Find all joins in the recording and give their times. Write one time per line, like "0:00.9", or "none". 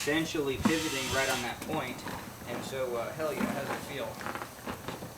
0:02.3